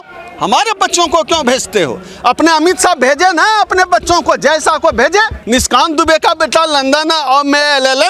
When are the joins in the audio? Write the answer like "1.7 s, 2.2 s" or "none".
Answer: 5.4 s